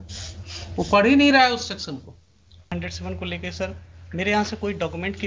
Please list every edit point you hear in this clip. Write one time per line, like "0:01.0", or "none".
0:02.7